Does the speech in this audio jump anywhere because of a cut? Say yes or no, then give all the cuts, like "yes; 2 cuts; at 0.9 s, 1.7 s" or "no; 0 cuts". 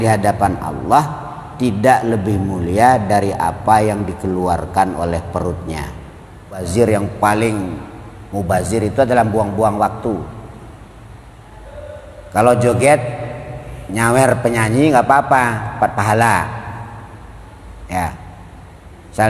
yes; 1 cut; at 6.6 s